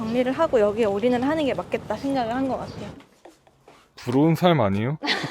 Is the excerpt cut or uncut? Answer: cut